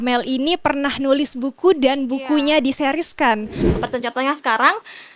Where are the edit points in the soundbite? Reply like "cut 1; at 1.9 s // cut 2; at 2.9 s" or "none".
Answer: cut 1; at 3.7 s